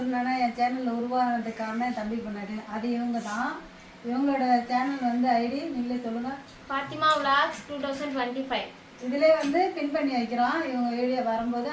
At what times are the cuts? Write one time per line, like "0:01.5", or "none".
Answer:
none